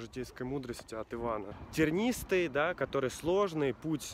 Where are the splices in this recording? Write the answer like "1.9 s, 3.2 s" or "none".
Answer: 1.5 s